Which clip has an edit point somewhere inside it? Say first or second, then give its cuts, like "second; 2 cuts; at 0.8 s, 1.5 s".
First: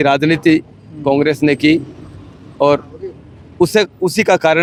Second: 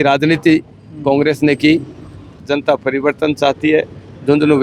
second; 1 cut; at 2.4 s